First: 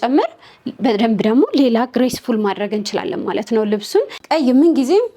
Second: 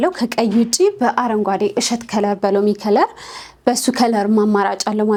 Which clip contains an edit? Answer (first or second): first